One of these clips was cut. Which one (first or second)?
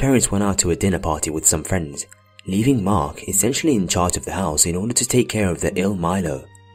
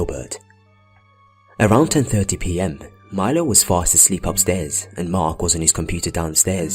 second